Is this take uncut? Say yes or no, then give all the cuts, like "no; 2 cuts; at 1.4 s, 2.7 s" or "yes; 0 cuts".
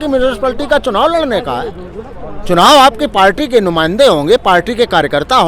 yes; 0 cuts